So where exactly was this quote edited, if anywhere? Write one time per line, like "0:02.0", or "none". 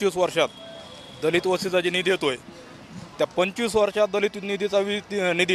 none